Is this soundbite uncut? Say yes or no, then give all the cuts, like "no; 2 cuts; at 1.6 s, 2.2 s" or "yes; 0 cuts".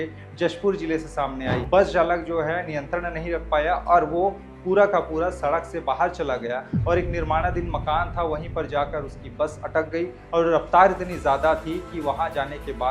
no; 1 cut; at 1.6 s